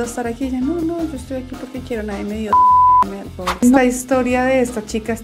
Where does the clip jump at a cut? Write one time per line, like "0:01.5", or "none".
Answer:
0:03.6

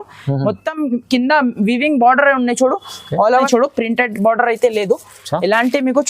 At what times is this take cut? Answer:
0:03.5

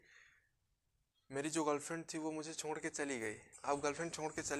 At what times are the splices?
0:03.5

